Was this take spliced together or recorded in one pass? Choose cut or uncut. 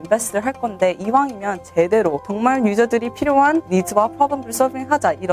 cut